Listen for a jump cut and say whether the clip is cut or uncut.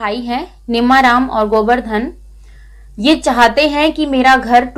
uncut